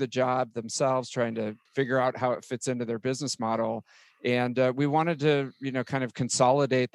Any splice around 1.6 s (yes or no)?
yes